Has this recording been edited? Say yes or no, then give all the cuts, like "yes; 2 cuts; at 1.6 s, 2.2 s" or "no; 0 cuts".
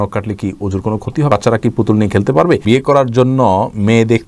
yes; 2 cuts; at 1.3 s, 2.6 s